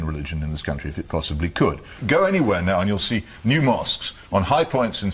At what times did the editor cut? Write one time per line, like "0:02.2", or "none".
0:02.0